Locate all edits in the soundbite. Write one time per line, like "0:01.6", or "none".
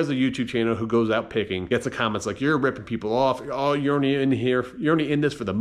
0:01.6